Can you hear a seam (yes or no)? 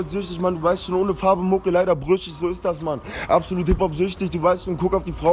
no